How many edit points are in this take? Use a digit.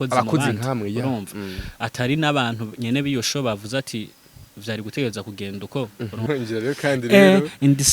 1